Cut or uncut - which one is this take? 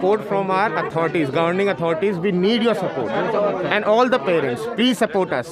uncut